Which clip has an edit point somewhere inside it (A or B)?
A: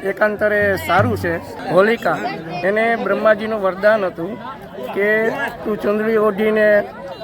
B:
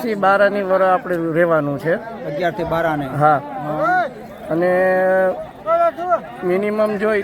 A